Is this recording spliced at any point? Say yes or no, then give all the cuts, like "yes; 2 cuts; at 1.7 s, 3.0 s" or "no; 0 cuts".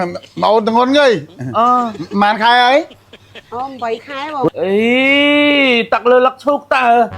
yes; 1 cut; at 4.4 s